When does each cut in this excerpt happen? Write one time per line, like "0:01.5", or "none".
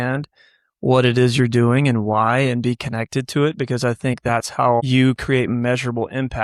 0:04.9